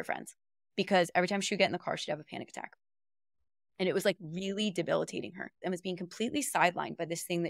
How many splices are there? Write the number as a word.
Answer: one